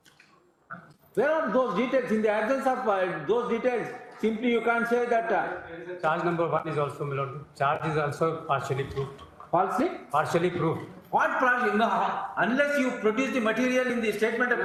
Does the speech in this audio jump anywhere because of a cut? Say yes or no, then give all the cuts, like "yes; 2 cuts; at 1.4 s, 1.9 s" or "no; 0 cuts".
no; 0 cuts